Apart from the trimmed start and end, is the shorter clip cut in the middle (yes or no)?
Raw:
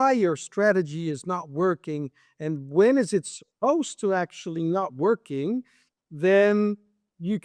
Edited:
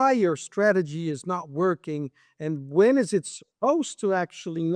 no